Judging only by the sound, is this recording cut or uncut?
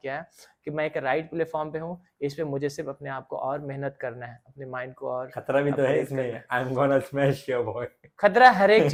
uncut